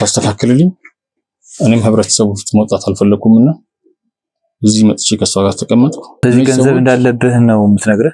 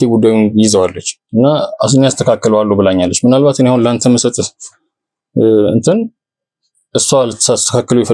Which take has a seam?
first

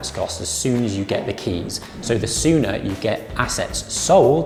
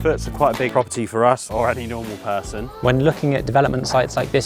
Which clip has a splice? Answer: second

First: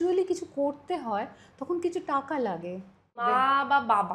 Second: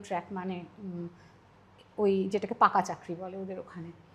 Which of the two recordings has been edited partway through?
first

